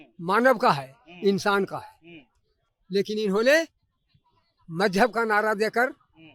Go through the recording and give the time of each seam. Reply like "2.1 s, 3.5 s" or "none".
none